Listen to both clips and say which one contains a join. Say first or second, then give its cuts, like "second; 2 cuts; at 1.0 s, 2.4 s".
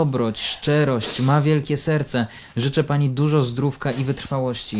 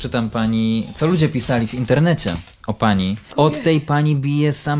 second; 1 cut; at 3.3 s